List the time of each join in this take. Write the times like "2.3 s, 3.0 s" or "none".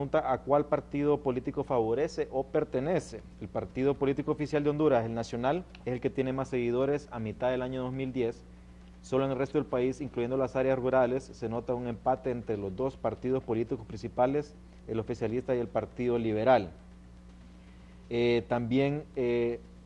none